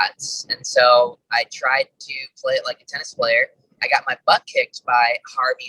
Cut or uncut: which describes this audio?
cut